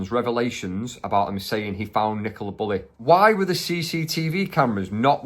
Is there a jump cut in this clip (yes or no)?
yes